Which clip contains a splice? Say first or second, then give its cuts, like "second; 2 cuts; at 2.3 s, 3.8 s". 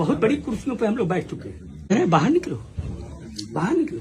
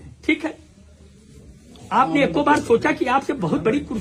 first; 1 cut; at 1.9 s